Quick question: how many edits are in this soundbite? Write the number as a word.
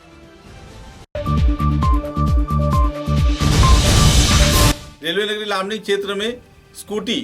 zero